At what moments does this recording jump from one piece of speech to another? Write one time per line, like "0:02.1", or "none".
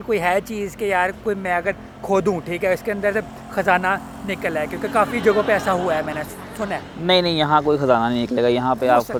none